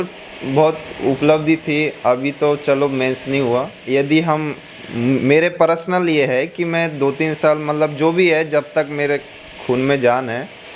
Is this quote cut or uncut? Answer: cut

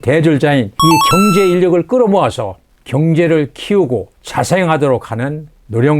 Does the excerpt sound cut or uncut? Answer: cut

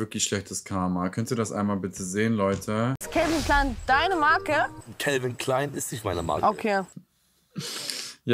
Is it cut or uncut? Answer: cut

